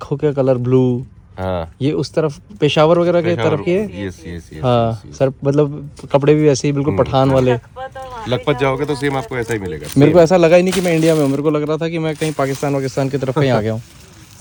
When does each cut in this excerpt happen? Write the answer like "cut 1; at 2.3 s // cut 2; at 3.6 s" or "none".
none